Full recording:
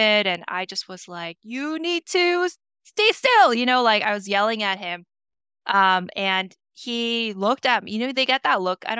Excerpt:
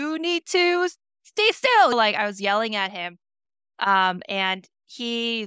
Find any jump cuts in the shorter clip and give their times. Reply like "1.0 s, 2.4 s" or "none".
1.9 s